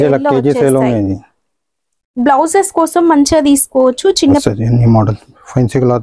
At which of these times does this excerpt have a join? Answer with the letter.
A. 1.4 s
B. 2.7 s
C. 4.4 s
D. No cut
C